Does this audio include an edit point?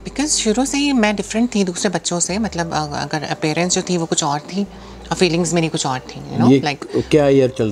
no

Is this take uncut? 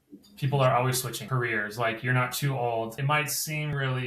no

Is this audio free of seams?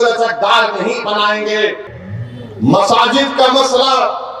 no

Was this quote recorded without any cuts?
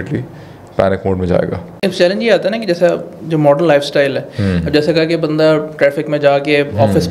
no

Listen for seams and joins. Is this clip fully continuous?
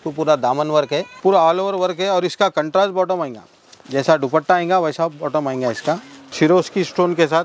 no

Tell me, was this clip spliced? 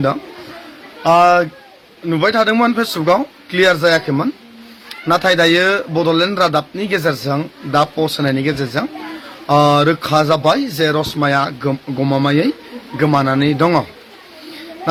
no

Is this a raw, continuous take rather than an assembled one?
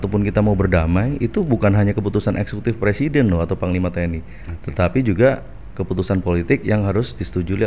yes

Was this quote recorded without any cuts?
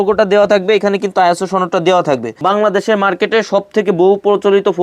no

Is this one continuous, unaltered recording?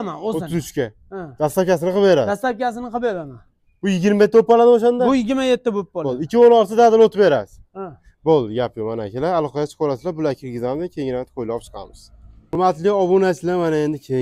yes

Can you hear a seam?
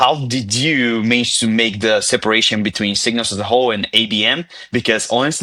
no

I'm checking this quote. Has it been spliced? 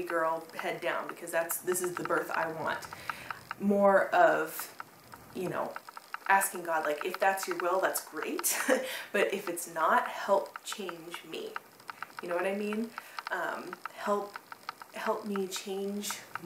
no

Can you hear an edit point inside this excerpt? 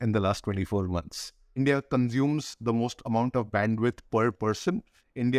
yes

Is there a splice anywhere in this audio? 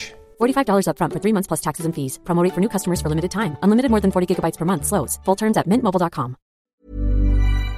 yes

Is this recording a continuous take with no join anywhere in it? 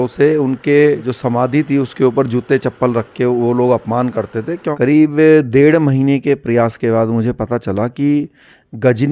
no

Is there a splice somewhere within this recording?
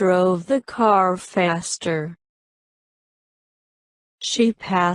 no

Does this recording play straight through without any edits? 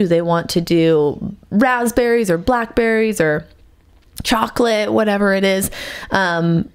yes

